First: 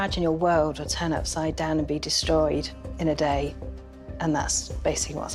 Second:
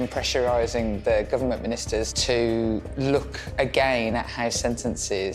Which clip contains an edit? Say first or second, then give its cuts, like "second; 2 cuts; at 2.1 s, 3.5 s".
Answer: second; 1 cut; at 3.4 s